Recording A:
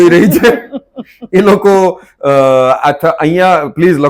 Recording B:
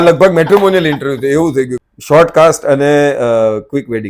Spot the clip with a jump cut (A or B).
B